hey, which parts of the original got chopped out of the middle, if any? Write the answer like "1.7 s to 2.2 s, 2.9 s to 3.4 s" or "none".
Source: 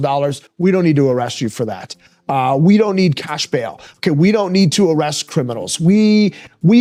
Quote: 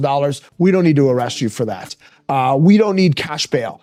none